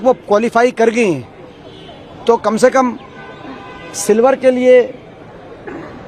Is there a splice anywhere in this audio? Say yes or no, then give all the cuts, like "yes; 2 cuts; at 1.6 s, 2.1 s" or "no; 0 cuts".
no; 0 cuts